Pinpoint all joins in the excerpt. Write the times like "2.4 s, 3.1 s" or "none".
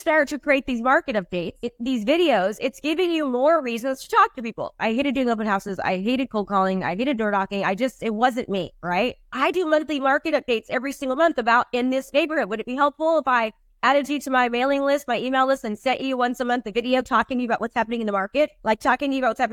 1.6 s, 4.7 s, 9.3 s, 18.6 s